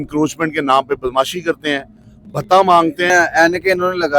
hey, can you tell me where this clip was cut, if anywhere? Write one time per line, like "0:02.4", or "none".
0:03.1